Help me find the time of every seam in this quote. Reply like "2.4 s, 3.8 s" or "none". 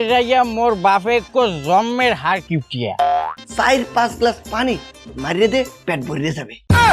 3.3 s

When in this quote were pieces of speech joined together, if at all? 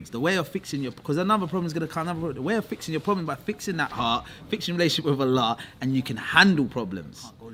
none

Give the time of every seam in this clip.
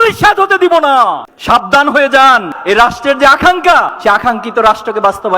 1.3 s, 2.5 s

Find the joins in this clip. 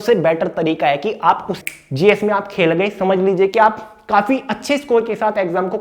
1.5 s

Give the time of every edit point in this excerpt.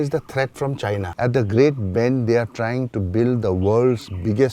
1.1 s

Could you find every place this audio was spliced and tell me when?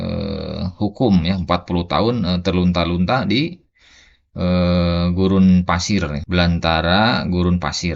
6.2 s

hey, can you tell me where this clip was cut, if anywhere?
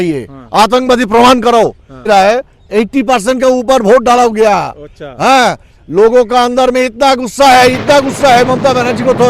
2.1 s

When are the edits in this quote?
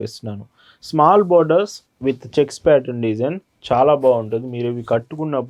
none

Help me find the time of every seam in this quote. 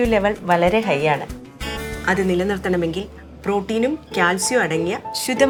none

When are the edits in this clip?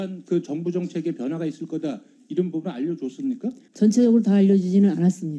3.6 s

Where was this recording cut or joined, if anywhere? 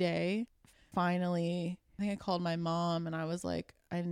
0.9 s, 1.9 s

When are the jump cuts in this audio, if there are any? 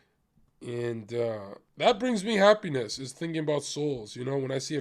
1.6 s

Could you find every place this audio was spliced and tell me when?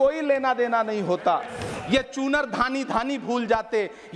1.7 s

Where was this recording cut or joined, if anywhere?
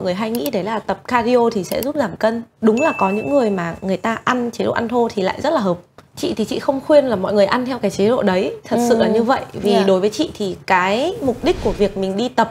2.5 s

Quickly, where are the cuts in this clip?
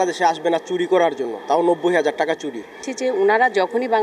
2.9 s

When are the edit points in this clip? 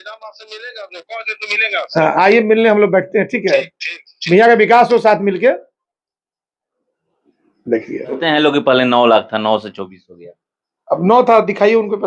8.2 s

